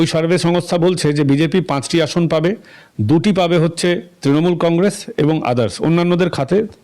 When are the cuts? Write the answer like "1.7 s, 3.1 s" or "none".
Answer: none